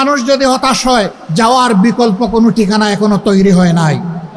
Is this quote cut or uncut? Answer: cut